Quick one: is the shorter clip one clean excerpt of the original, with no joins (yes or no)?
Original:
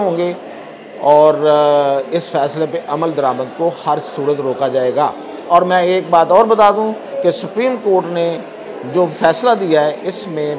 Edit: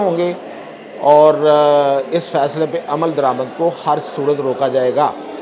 yes